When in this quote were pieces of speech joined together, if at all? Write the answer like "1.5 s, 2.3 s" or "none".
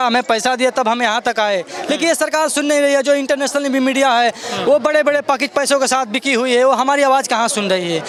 none